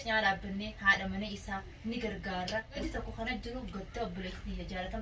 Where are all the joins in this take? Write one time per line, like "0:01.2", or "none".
0:02.8